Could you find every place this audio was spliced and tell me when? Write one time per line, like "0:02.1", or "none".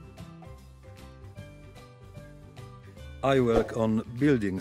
0:03.2